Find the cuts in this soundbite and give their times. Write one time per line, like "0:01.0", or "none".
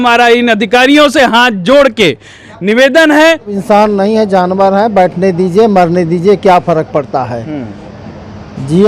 0:03.6

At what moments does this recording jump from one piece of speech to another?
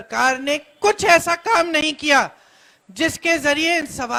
none

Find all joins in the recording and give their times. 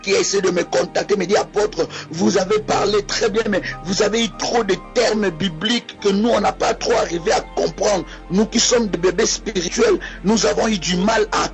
0:06.8

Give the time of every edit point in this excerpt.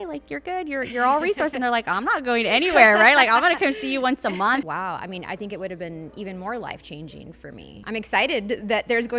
0:04.7
0:07.7

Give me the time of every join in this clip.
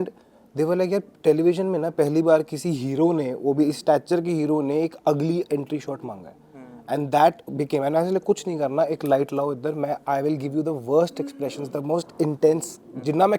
none

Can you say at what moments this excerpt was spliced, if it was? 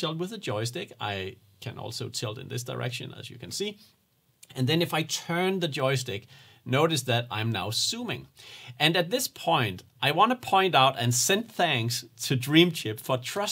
none

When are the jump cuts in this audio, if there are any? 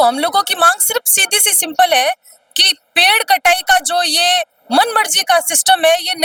none

